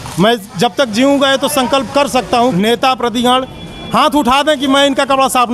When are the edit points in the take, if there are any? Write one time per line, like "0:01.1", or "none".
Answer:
0:02.5

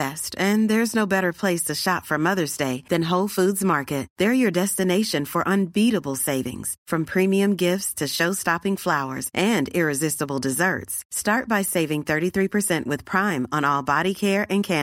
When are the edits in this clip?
none

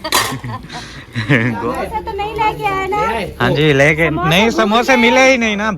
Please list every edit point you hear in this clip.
0:01.6

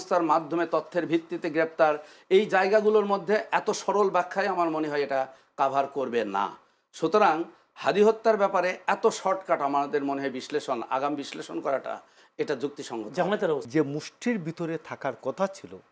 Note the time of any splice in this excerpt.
0:13.6

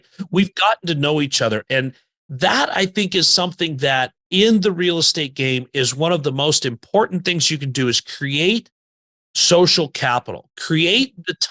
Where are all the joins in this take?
0:04.2

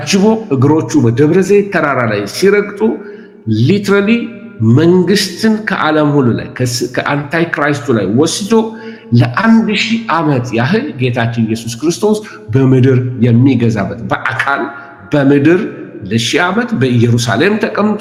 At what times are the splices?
none

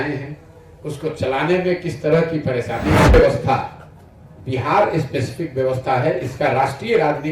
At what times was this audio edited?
0:03.1

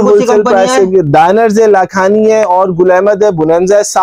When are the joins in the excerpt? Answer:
none

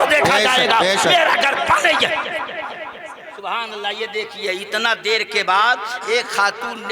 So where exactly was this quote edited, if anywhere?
0:03.2

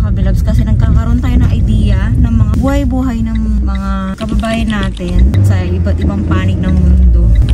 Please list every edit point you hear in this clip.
none

